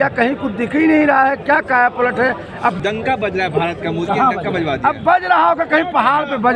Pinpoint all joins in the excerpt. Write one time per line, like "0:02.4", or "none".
0:02.8